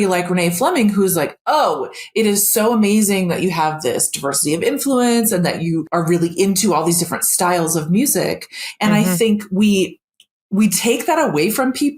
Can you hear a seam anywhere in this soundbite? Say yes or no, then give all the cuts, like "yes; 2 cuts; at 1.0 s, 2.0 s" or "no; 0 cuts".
yes; 1 cut; at 5.9 s